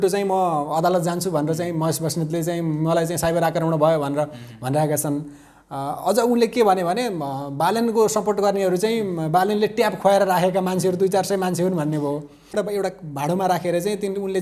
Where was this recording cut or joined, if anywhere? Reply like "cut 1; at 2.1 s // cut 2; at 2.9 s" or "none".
cut 1; at 12.6 s